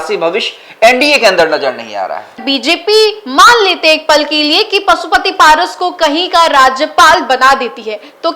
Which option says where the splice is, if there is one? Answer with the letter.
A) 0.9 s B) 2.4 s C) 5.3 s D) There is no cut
B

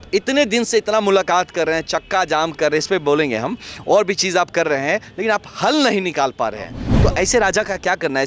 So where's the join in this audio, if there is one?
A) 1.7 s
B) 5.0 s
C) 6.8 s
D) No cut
C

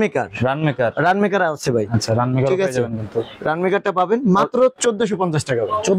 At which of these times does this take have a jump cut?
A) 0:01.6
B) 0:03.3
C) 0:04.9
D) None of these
D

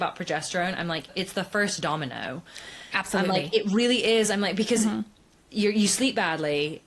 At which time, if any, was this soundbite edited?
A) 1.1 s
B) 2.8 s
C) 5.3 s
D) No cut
A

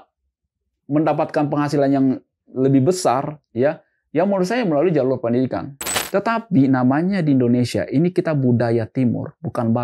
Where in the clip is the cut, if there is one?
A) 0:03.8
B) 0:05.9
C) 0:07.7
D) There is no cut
B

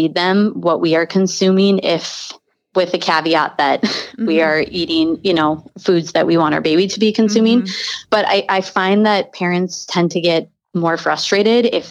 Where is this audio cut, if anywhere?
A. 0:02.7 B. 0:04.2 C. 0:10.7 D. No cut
C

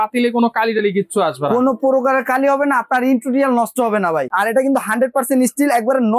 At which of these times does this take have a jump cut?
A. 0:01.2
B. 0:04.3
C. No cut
B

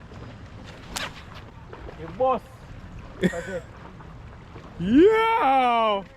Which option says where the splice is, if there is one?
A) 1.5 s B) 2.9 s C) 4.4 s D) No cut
A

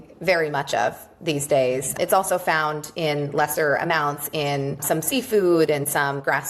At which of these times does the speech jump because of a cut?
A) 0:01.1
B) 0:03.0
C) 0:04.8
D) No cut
C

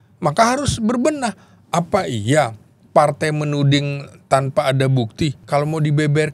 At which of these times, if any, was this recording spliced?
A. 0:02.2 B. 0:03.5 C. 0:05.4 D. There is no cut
C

